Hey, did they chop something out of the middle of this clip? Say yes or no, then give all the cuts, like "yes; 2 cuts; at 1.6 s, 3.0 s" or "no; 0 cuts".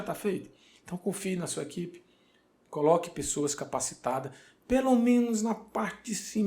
no; 0 cuts